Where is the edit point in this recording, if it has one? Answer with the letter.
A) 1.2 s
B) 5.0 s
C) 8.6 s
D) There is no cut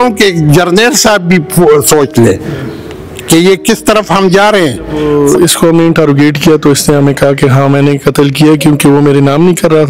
B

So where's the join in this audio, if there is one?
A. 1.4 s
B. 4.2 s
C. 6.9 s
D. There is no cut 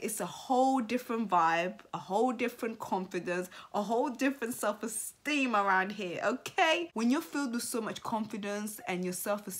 C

